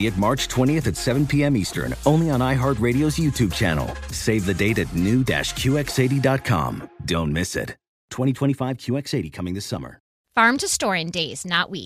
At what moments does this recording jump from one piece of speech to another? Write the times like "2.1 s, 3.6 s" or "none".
10.1 s